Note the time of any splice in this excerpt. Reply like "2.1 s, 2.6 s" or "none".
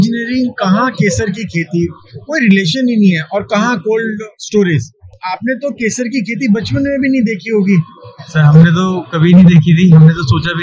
none